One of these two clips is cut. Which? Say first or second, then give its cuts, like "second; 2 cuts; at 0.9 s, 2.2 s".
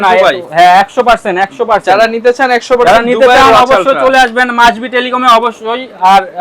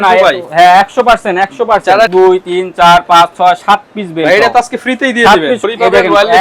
second; 2 cuts; at 2.1 s, 5.6 s